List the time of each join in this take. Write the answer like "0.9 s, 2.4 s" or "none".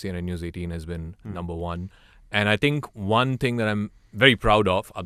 none